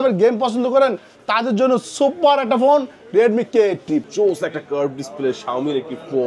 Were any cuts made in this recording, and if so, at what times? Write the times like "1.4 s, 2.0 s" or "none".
4.1 s